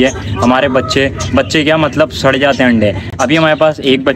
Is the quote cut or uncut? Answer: uncut